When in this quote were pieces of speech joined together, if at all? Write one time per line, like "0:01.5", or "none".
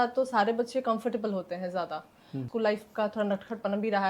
0:02.5